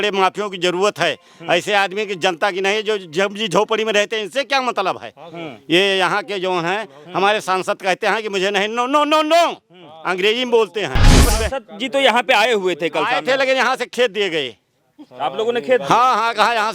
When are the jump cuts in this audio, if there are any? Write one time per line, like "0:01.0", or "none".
0:11.2